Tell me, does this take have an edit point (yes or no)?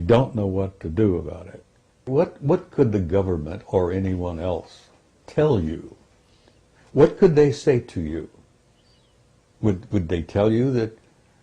yes